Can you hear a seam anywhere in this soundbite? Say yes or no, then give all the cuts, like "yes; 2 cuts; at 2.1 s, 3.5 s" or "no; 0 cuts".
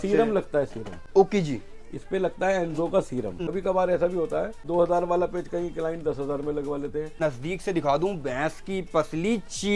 yes; 3 cuts; at 3.4 s, 4.6 s, 7.2 s